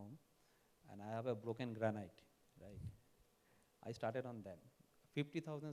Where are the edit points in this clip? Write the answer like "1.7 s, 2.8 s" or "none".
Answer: none